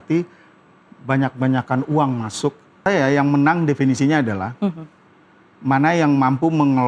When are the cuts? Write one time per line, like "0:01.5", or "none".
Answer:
0:02.9